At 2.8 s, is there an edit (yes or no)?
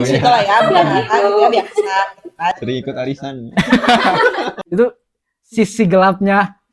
no